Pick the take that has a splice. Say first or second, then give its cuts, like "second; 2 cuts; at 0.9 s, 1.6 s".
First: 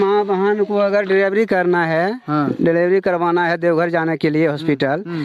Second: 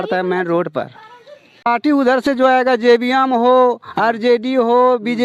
second; 1 cut; at 1.7 s